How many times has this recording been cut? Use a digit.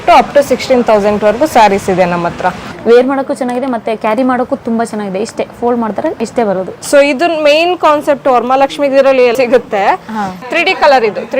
3